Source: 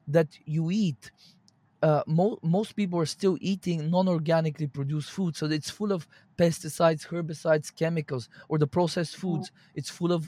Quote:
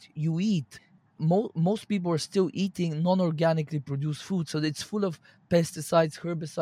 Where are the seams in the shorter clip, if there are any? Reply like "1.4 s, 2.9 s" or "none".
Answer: 1.2 s